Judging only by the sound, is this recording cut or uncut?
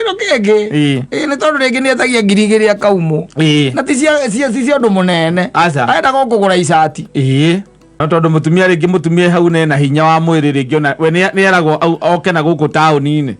cut